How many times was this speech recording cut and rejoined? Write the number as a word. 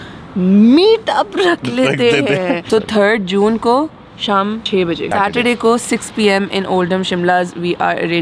two